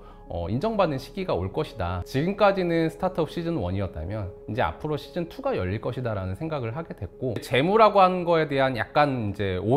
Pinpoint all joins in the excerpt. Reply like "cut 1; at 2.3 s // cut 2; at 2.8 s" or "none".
none